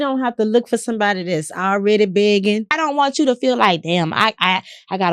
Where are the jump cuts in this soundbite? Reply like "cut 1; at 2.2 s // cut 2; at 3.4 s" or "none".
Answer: cut 1; at 2.7 s